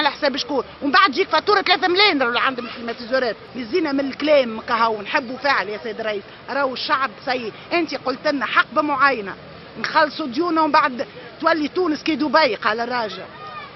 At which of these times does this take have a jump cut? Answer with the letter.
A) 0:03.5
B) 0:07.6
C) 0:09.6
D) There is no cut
A